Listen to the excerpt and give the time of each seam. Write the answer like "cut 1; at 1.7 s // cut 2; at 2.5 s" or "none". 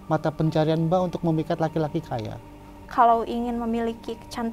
cut 1; at 2.8 s